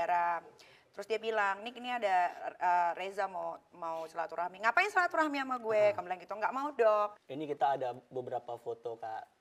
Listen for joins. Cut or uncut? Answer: cut